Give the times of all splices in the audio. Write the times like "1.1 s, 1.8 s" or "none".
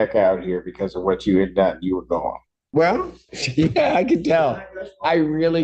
2.6 s